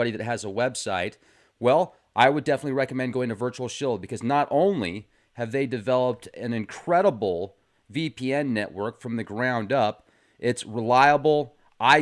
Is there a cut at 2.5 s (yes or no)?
no